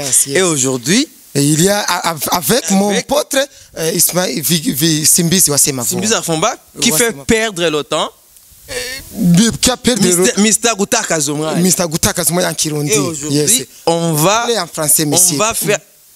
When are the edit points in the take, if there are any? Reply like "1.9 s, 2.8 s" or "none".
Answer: none